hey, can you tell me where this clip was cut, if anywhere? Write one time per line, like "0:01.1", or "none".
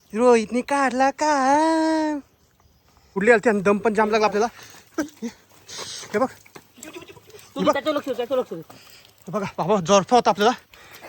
0:03.0

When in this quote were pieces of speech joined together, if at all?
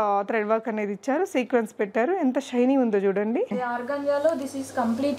0:03.5

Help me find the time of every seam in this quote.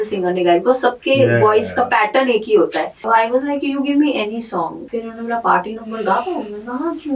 0:03.0
0:04.8

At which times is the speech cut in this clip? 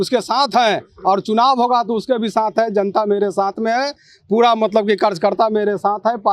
none

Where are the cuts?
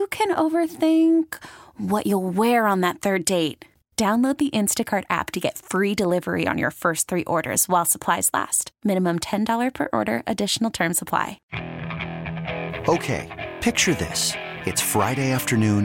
0:11.4

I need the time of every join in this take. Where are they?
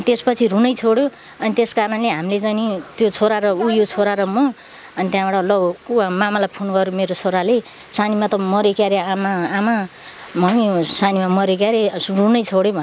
none

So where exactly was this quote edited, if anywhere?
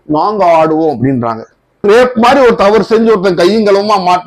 0:01.8

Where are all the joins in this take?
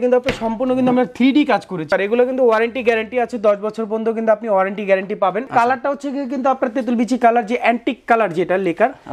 0:01.9
0:05.5

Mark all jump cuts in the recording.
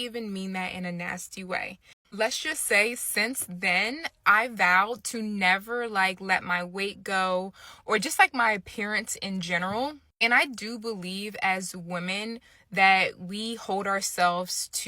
0:02.0

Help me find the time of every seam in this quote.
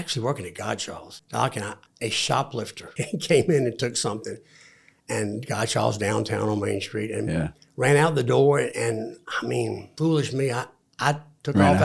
0:01.1
0:01.8
0:02.9
0:09.9

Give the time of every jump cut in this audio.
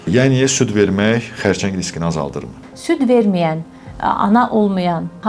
0:02.7

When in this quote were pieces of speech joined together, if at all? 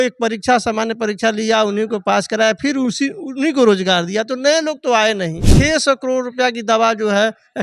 0:05.5

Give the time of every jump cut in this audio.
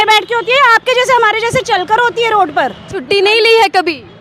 0:03.0

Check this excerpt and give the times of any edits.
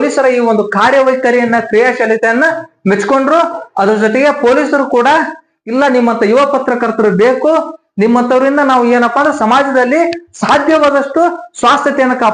none

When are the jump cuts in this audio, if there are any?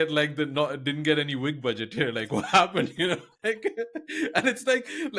none

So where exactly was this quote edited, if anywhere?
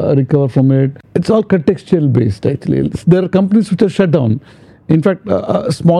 0:01.0

